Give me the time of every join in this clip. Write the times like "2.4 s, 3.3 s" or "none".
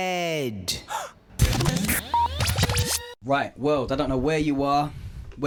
none